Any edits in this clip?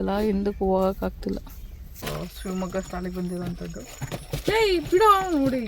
yes; 1 cut; at 2.0 s

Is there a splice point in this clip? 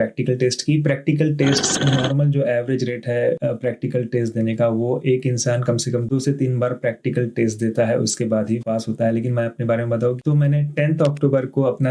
yes; 1 cut; at 1.8 s

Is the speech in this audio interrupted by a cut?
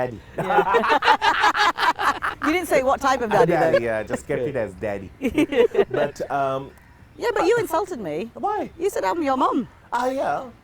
no; 0 cuts

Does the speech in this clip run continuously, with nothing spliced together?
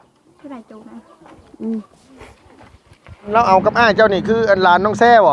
no; 1 cut; at 3.3 s

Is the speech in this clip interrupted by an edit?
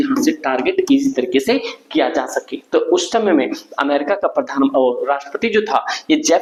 no; 0 cuts

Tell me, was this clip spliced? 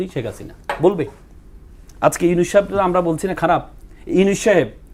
no; 0 cuts

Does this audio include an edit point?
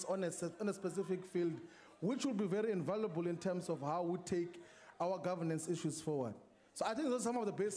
yes; 1 cut; at 1.1 s

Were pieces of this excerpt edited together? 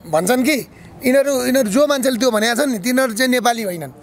no; 0 cuts

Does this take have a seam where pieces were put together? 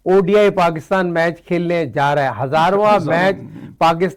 no; 0 cuts

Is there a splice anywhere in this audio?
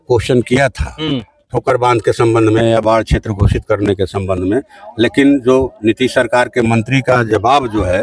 no; 0 cuts

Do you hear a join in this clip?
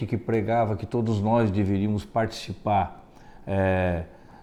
no; 0 cuts

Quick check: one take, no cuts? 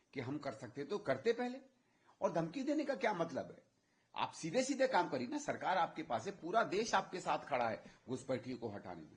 yes; 0 cuts

